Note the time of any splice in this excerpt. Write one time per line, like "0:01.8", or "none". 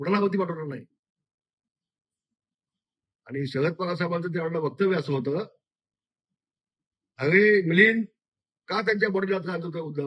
none